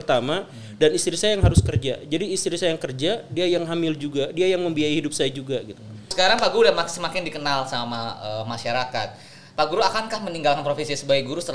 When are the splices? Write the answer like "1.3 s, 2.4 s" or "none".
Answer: 6.1 s